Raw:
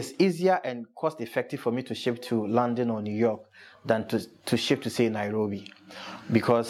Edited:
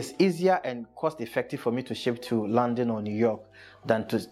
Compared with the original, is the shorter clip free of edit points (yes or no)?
yes